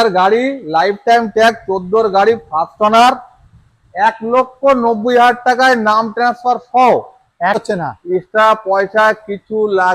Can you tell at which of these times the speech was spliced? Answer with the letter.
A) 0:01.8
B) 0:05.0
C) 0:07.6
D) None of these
C